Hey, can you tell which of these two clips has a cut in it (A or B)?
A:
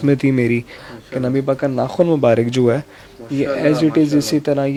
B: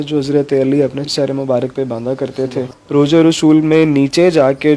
B